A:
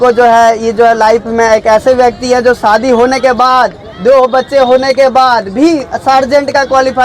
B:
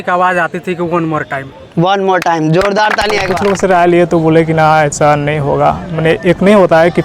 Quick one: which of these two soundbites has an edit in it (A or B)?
B